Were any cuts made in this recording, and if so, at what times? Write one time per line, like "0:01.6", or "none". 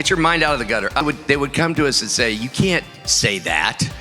0:01.0